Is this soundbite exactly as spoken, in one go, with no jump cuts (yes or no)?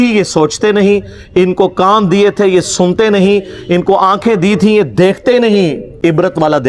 yes